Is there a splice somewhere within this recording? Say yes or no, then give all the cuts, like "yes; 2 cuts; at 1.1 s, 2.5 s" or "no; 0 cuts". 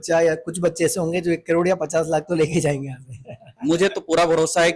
no; 0 cuts